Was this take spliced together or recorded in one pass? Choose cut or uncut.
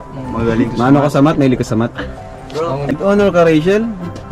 cut